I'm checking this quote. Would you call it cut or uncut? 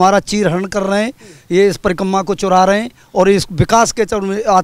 uncut